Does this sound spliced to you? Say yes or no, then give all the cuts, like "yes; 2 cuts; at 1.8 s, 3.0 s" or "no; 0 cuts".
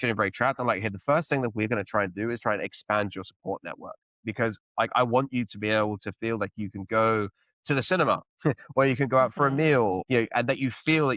yes; 1 cut; at 10.0 s